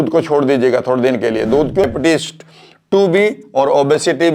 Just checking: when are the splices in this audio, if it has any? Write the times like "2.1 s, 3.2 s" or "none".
1.8 s